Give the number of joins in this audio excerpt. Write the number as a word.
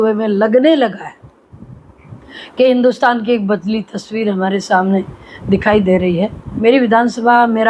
one